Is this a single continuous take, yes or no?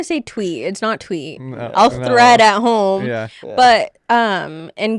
yes